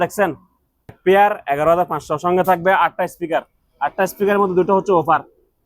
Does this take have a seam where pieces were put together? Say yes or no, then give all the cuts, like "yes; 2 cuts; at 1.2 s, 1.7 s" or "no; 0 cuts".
yes; 1 cut; at 1.0 s